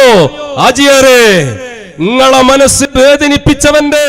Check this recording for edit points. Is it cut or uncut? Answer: cut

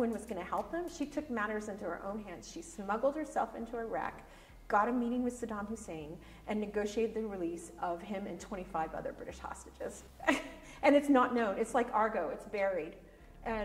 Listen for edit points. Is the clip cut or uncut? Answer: uncut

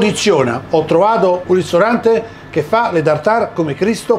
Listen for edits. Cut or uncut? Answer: cut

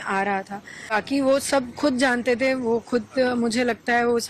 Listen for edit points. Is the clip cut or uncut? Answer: cut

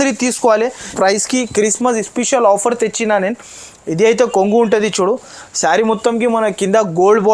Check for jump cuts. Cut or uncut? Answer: cut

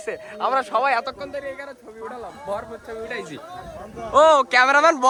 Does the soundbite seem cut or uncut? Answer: uncut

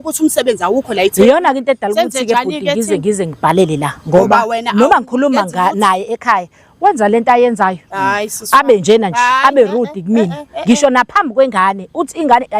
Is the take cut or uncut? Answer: uncut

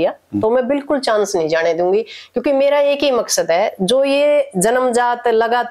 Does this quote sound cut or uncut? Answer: uncut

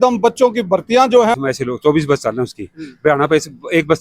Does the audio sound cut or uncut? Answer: cut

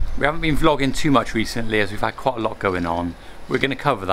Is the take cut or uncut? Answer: uncut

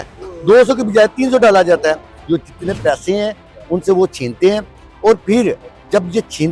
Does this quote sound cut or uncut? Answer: cut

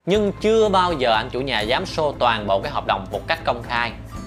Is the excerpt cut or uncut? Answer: uncut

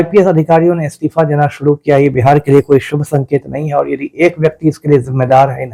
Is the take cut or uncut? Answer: uncut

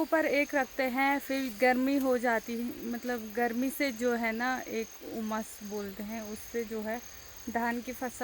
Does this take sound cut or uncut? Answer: uncut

